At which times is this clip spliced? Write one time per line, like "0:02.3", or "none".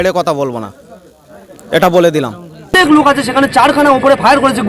0:02.9